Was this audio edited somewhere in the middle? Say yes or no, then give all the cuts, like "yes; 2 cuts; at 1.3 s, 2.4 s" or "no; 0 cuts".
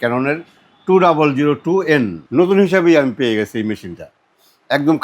yes; 1 cut; at 2.2 s